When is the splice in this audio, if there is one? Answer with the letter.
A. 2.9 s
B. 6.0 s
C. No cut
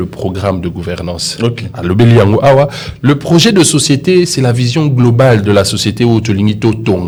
C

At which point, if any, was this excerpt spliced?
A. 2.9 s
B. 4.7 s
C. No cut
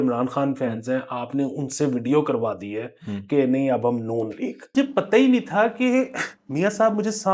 B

